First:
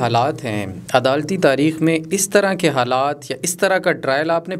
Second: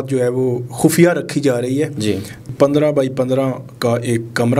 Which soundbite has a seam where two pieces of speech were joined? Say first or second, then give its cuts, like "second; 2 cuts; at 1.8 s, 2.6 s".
second; 1 cut; at 2.4 s